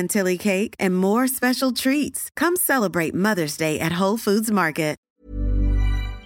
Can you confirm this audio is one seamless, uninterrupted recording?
no; 1 cut; at 5.0 s

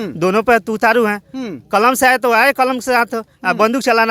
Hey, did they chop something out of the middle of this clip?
no; 0 cuts

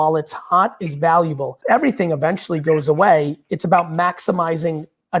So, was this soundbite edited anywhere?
yes; 1 cut; at 1.5 s

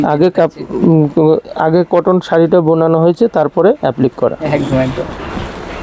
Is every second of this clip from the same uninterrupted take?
yes; 0 cuts

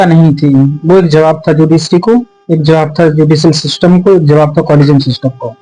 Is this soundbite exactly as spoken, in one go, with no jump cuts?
yes; 0 cuts

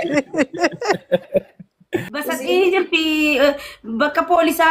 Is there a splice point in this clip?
yes; 1 cut; at 2.1 s

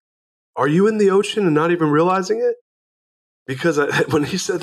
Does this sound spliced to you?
no; 0 cuts

